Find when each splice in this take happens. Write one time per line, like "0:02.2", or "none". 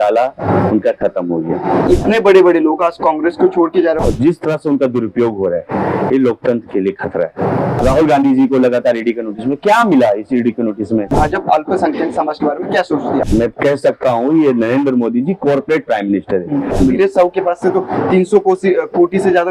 0:01.8
0:04.0
0:07.8
0:11.1
0:13.3
0:16.7

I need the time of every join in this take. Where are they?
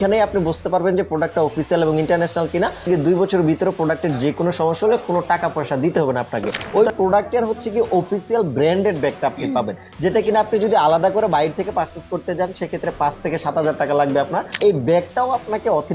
0:02.8
0:06.6
0:14.6

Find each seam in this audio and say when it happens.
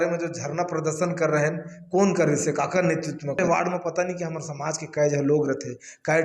0:03.4

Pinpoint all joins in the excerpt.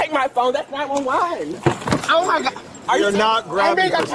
none

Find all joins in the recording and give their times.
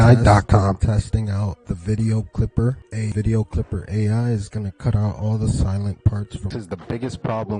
0:06.5

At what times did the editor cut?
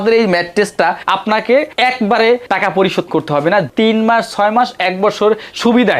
0:01.0
0:03.7

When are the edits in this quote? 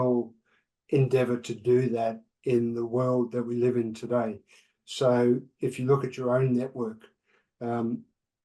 none

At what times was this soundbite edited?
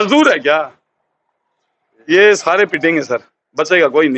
none

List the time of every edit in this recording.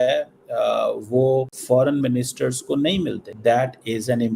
0:01.6
0:03.3

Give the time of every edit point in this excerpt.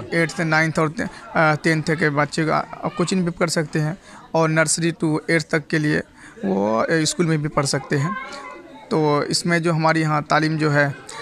none

